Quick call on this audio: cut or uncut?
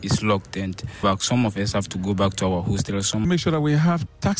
cut